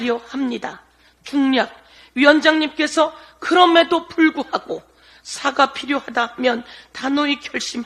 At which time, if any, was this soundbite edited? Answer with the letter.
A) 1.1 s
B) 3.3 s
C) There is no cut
C